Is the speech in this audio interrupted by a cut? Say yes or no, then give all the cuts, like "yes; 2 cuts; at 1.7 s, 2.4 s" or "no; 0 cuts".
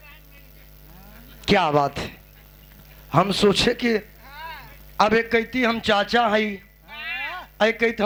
no; 0 cuts